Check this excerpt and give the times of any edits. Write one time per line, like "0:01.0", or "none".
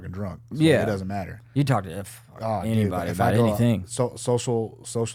none